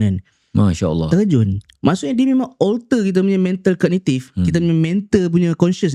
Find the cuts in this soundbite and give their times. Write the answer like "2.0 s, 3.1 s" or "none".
none